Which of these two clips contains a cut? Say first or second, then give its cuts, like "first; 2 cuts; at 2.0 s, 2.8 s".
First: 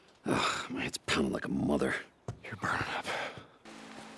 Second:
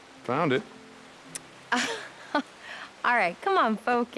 first; 1 cut; at 3.3 s